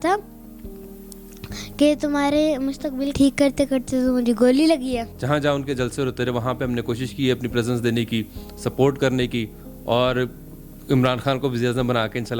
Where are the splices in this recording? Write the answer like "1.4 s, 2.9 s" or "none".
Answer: 3.1 s, 5.1 s